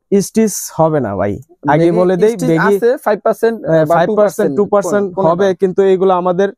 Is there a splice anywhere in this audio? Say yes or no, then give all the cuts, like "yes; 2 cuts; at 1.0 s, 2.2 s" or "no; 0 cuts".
no; 0 cuts